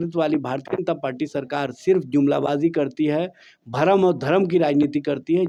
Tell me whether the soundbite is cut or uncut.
uncut